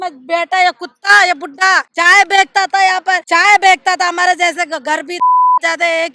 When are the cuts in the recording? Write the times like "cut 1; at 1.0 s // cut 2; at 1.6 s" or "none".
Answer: cut 1; at 1.9 s // cut 2; at 3.2 s